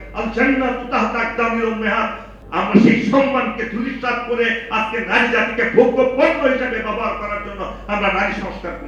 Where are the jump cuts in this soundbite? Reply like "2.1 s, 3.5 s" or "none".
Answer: 2.3 s